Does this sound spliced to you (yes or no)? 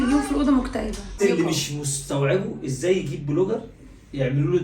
yes